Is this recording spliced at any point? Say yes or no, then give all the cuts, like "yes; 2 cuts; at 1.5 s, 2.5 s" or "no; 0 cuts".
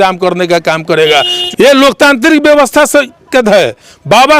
yes; 1 cut; at 1.4 s